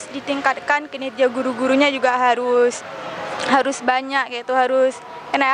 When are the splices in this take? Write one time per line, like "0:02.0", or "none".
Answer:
none